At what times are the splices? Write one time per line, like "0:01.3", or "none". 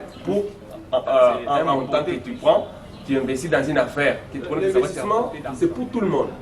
0:01.8
0:04.6